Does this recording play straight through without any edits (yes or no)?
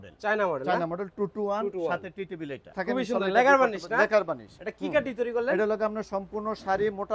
no